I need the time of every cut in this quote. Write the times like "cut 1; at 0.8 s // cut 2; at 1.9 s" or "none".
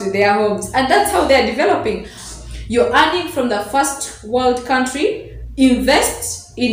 cut 1; at 2.2 s